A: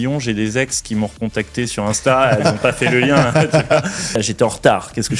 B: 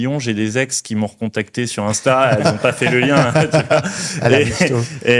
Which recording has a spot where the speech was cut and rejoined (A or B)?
A